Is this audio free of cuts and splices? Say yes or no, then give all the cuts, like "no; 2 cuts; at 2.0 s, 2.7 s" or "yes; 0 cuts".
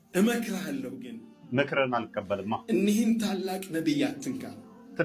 yes; 0 cuts